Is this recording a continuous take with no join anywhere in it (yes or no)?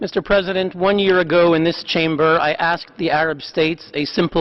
yes